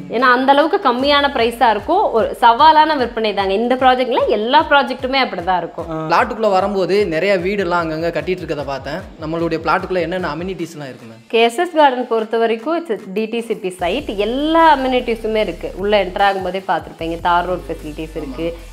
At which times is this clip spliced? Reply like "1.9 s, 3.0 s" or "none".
6.1 s